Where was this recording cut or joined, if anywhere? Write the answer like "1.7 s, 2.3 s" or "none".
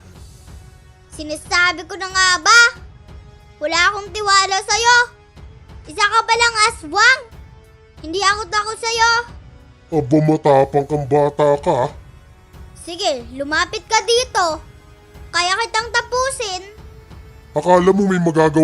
1.2 s